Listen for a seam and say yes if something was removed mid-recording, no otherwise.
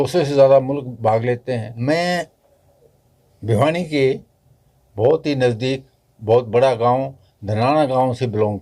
yes